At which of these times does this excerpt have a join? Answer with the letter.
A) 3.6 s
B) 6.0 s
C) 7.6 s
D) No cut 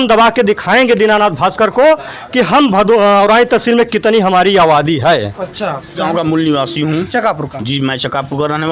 B